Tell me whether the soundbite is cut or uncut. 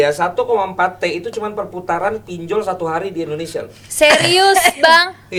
uncut